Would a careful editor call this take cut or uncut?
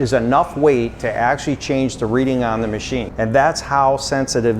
cut